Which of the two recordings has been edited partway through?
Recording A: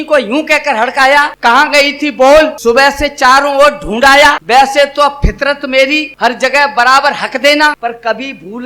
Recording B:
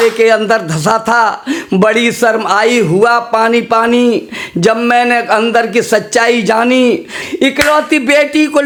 A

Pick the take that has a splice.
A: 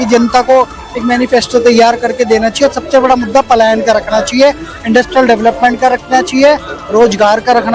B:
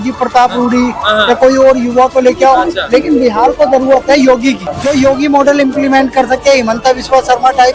B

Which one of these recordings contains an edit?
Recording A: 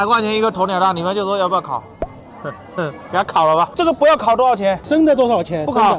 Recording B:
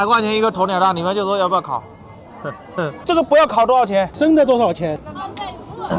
B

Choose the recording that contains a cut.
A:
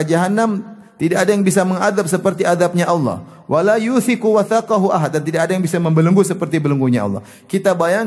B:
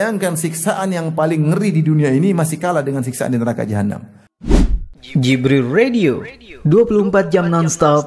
B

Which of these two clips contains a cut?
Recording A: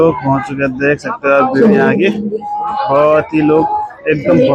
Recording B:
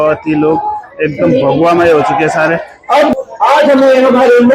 B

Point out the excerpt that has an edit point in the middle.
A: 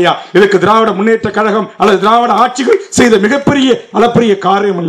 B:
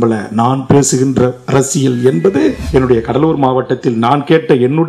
B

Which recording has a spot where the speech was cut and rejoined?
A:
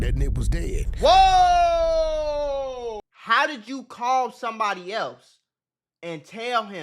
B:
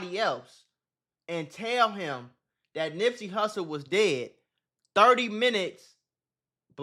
A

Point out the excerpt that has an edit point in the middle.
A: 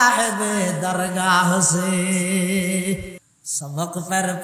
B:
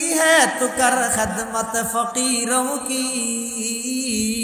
A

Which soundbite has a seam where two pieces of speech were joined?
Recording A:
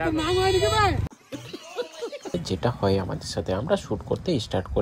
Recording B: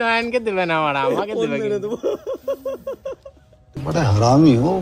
A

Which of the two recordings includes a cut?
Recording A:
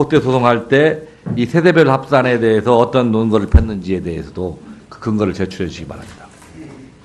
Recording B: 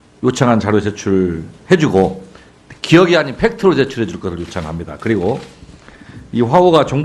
B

